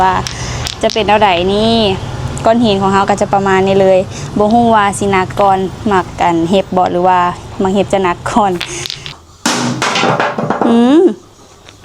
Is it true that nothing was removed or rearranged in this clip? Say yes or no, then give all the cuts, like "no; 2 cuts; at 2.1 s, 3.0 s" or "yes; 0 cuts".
no; 1 cut; at 9.1 s